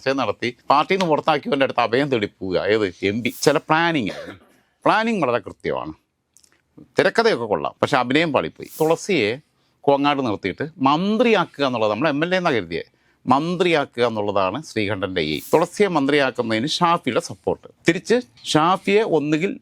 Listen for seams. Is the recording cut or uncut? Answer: cut